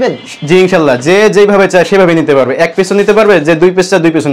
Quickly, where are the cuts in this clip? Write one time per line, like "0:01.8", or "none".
none